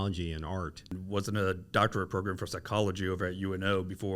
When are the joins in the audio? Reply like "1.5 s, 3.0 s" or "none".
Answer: 0.9 s